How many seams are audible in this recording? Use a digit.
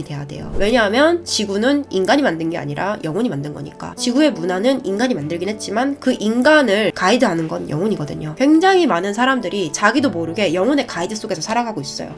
0